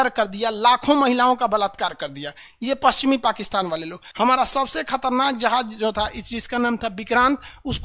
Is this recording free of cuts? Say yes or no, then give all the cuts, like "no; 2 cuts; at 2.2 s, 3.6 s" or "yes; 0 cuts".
no; 1 cut; at 4.0 s